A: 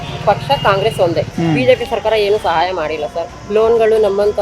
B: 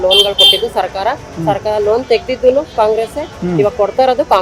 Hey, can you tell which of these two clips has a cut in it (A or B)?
A